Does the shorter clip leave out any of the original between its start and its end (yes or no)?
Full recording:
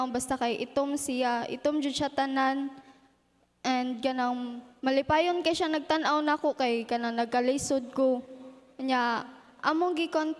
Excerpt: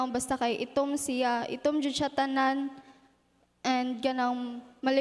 no